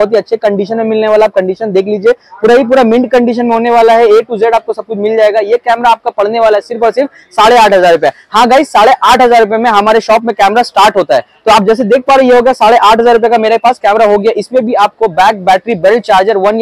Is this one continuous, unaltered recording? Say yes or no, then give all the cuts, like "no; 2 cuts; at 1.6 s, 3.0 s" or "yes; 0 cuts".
yes; 0 cuts